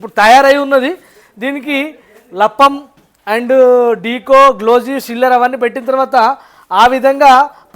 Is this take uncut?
yes; 0 cuts

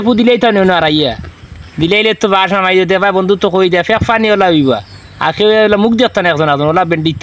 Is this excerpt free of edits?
yes; 0 cuts

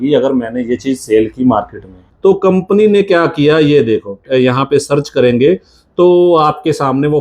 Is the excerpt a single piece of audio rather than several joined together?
no; 2 cuts; at 2.0 s, 4.2 s

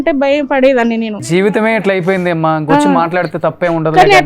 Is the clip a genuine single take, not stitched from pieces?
no; 1 cut; at 1.5 s

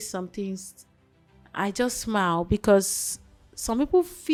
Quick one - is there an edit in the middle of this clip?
no; 0 cuts

